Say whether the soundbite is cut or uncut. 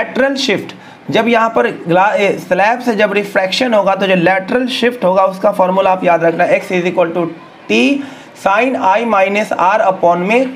uncut